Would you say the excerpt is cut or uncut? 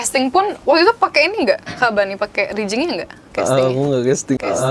uncut